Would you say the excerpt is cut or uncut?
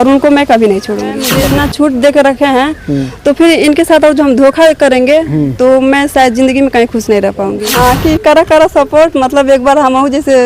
cut